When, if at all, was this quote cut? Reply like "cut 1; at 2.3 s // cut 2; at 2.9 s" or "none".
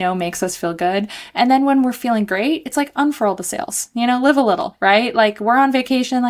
none